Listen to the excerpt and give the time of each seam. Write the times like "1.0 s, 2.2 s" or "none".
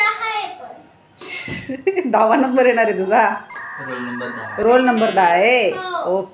none